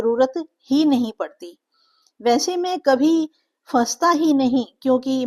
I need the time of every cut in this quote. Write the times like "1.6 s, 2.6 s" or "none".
none